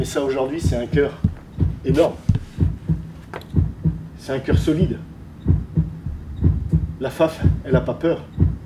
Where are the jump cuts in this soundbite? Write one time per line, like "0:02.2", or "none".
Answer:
none